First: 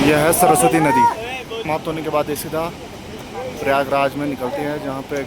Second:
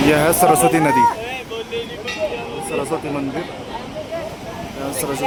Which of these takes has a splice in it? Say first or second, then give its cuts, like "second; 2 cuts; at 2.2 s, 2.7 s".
first; 1 cut; at 1.6 s